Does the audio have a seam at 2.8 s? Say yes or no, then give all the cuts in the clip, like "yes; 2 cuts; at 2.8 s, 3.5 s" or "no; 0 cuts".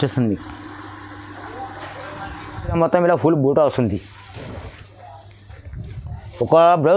yes; 1 cut; at 2.8 s